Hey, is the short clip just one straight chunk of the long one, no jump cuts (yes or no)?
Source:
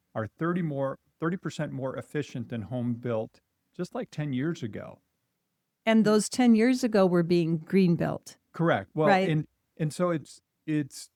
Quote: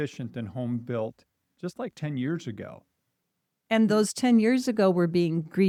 yes